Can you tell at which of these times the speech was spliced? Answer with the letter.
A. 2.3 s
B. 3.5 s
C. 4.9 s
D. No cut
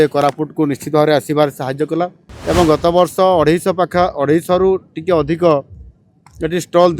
A